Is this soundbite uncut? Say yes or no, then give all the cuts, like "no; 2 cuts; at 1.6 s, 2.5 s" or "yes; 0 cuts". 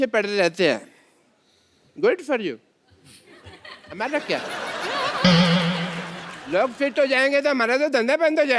yes; 0 cuts